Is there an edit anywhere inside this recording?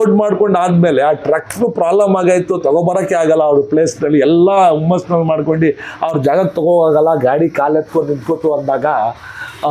no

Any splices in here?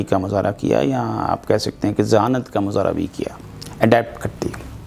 no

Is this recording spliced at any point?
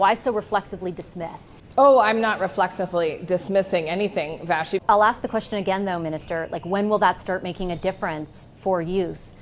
yes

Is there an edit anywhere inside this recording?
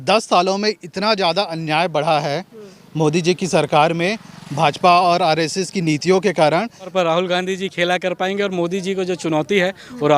yes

